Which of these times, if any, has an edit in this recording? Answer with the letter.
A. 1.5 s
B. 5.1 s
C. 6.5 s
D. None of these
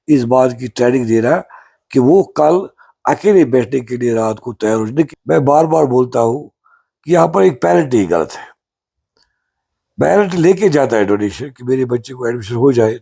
B